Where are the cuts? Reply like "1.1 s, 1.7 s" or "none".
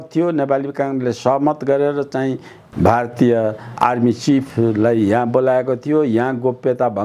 2.6 s, 3.7 s